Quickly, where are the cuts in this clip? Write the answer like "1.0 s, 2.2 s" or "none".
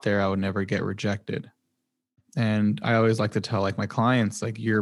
2.2 s

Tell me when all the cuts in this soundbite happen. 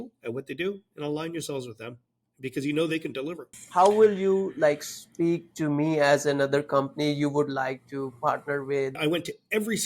3.5 s, 8.9 s

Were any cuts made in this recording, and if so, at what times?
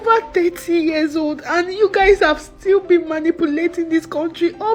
none

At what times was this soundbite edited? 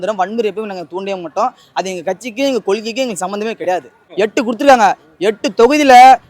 4.0 s

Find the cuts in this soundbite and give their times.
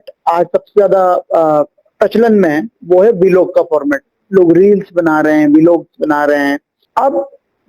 6.8 s

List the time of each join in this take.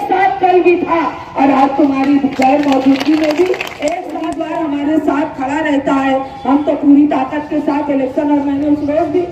4.2 s

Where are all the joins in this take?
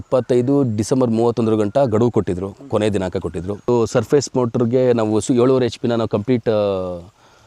3.7 s

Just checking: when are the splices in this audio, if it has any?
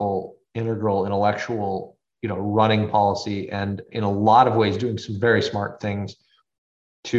2.0 s, 3.9 s

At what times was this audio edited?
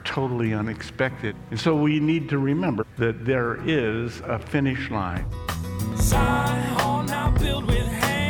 1.3 s, 2.8 s, 5.2 s

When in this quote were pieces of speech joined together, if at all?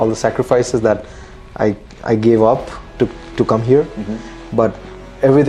none

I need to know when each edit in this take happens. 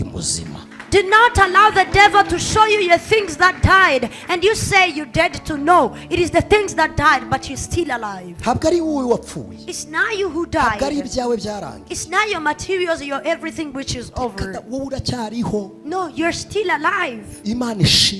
none

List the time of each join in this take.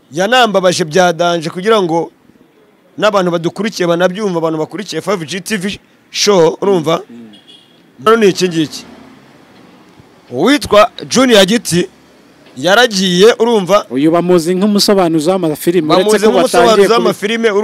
8.1 s

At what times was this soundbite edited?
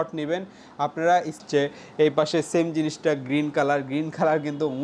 1.4 s

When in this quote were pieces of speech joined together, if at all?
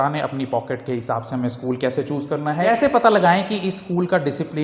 2.7 s

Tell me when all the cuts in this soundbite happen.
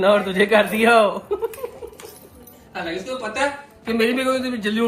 none

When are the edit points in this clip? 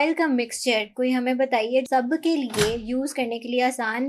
1.9 s

